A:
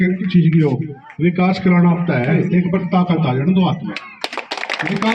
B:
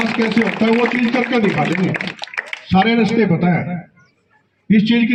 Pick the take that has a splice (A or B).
A